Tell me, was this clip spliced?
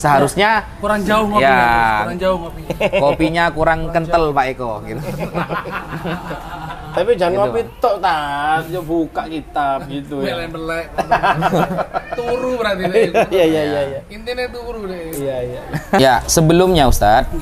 yes; 1 cut; at 16.0 s

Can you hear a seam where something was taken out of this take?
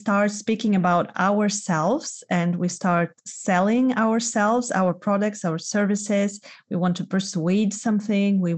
no; 0 cuts

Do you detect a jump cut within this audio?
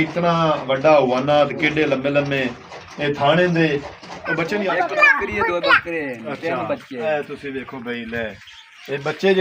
yes; 1 cut; at 4.5 s

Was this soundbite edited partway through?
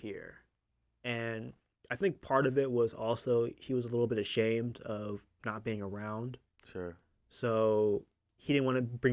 no; 0 cuts

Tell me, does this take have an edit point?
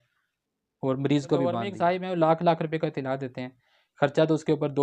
yes; 1 cut; at 1.7 s

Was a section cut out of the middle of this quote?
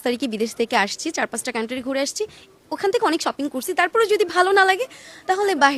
no; 0 cuts

